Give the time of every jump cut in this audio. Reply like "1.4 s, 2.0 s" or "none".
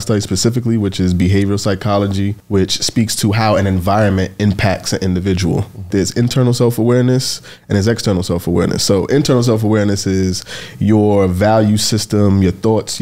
2.4 s, 5.9 s

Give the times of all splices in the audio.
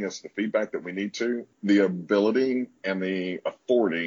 1.5 s

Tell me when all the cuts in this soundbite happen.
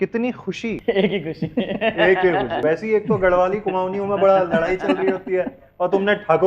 0.8 s, 2.5 s

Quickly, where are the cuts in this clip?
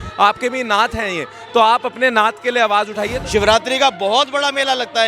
3.1 s

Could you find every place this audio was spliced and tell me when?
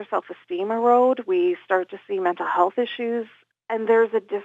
3.4 s

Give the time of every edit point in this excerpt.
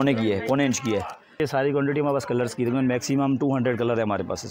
1.4 s

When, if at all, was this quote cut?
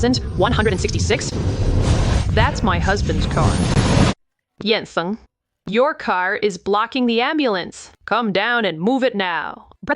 4.1 s

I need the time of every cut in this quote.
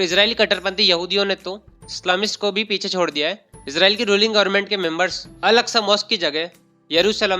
3.5 s, 5.2 s

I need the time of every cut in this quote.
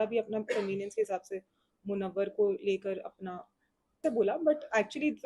4.0 s

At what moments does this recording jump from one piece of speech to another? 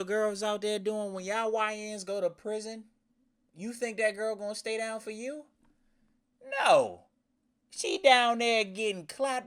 none

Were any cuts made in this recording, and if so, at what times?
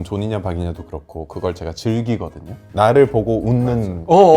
2.6 s

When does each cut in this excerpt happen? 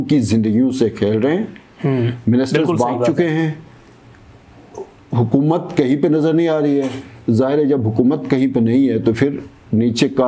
none

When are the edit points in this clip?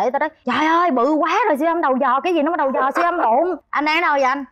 3.6 s

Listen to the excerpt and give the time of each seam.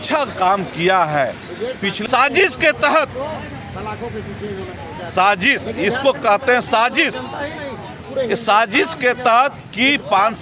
2.0 s

